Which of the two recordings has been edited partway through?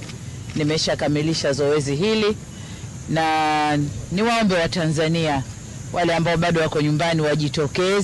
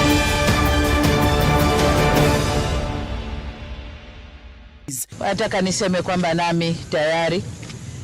second; 1 cut; at 5.0 s

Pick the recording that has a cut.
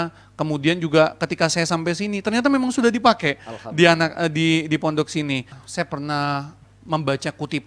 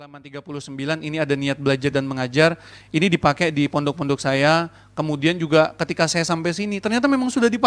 first; 1 cut; at 5.6 s

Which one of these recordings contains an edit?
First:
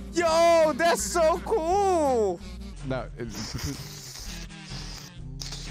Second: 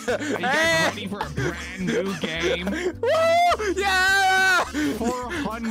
second; 1 cut; at 4.7 s

